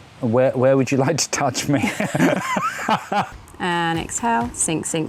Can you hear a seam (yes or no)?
yes